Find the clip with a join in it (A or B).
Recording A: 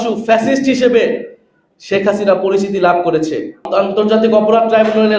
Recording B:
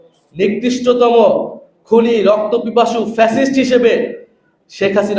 A